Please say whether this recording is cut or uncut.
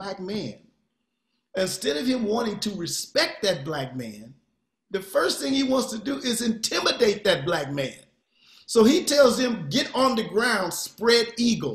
uncut